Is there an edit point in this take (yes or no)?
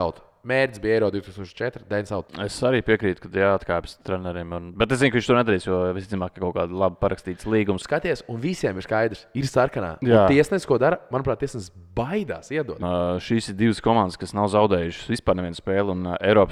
yes